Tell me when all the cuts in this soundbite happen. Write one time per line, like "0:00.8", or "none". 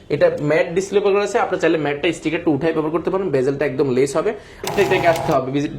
0:04.7